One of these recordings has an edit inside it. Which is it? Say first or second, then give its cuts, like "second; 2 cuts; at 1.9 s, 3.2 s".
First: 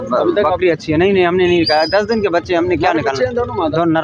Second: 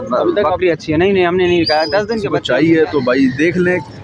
second; 1 cut; at 2.3 s